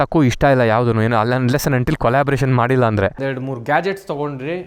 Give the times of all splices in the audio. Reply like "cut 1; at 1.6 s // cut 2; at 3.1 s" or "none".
cut 1; at 3.1 s